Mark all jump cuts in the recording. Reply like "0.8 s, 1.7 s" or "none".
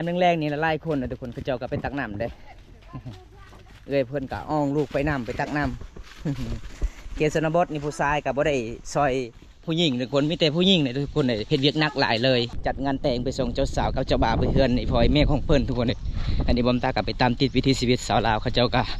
12.5 s